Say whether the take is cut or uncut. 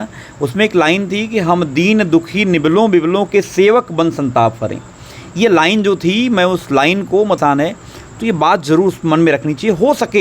cut